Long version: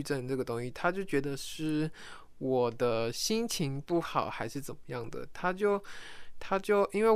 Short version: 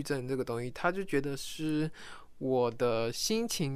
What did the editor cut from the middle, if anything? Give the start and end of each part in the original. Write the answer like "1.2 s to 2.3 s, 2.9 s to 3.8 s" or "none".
none